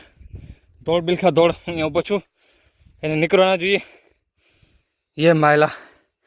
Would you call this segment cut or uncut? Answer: uncut